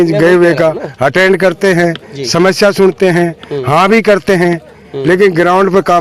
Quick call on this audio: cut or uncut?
uncut